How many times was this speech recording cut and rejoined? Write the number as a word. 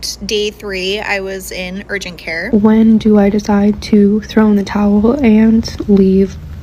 one